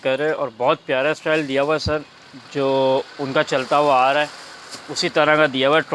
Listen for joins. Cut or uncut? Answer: uncut